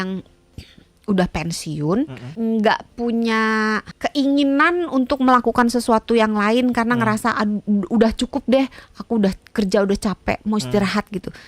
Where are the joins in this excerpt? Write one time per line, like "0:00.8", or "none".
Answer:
0:02.2
0:03.9